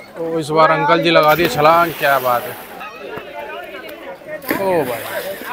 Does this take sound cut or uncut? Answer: cut